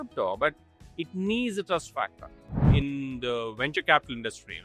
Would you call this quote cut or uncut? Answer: cut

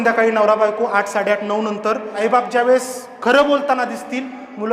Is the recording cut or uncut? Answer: cut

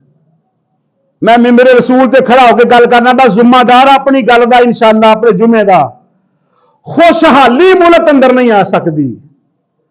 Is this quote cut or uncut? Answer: uncut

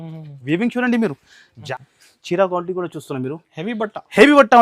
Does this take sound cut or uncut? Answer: cut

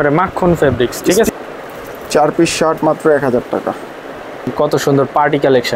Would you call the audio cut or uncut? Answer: cut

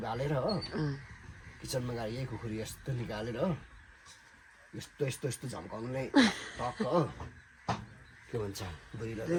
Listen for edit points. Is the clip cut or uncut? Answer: uncut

